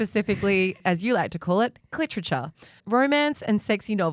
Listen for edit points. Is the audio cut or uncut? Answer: uncut